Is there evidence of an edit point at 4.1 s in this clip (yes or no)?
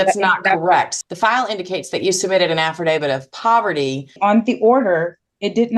yes